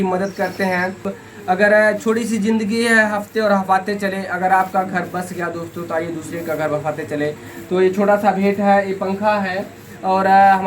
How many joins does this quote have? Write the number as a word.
one